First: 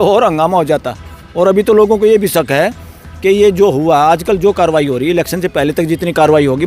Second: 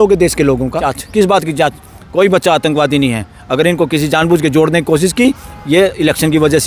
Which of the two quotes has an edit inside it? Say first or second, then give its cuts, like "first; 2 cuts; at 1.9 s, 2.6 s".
second; 1 cut; at 1.0 s